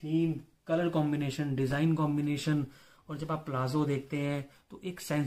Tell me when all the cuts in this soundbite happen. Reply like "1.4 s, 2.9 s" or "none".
none